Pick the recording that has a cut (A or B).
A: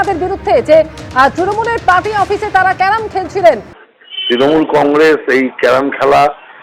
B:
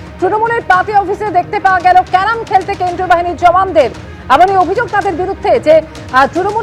A